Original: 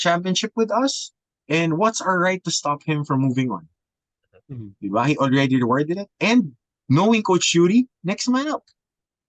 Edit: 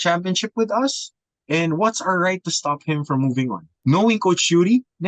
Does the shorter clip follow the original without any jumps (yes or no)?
no